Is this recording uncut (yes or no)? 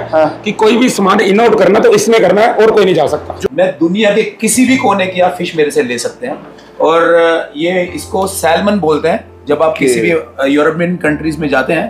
no